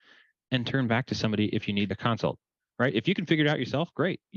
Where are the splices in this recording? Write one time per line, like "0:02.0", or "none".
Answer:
none